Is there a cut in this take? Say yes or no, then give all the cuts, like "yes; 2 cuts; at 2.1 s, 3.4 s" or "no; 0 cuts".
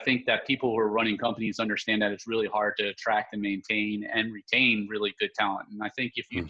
no; 0 cuts